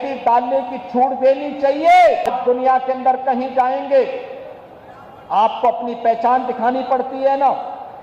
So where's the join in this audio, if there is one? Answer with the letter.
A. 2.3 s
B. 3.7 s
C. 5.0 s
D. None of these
A